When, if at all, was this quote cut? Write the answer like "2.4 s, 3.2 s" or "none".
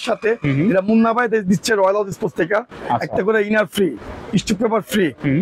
2.8 s

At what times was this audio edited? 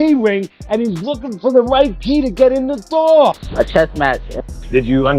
3.4 s

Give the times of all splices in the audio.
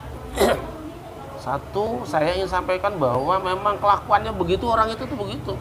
none

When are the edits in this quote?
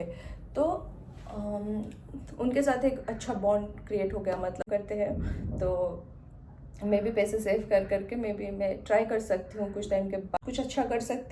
4.6 s, 10.4 s

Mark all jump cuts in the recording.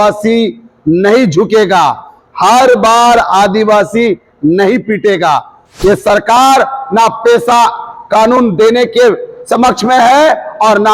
5.6 s

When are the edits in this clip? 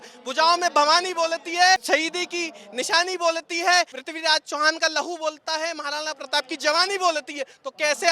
1.8 s, 4.0 s

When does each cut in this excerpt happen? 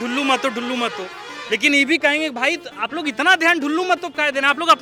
none

